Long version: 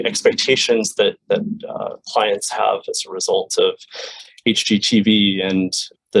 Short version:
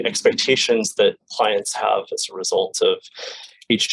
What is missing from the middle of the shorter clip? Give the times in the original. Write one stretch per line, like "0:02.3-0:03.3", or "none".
0:01.2-0:02.0